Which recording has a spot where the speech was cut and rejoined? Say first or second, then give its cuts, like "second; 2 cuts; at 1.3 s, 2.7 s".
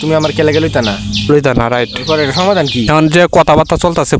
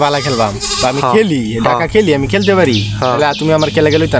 first; 1 cut; at 2.9 s